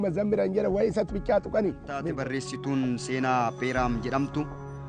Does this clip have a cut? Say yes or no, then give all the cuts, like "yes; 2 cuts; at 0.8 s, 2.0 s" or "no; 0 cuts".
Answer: yes; 1 cut; at 2.1 s